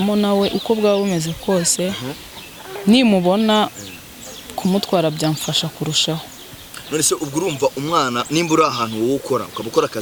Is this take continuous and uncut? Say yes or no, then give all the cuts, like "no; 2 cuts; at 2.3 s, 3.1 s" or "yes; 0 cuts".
yes; 0 cuts